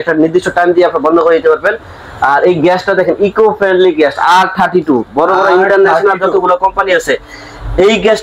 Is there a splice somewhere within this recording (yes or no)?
no